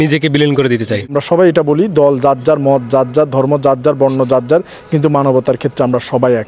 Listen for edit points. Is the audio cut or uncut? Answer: cut